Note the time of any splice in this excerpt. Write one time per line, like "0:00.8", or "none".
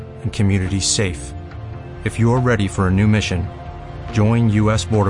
none